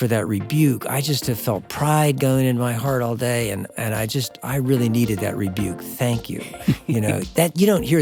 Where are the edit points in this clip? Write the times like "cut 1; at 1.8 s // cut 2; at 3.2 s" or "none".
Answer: none